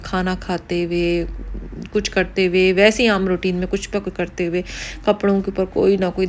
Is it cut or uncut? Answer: uncut